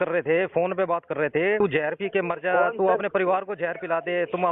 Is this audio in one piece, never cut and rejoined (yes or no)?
no